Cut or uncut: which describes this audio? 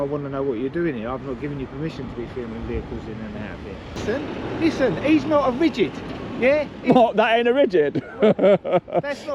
cut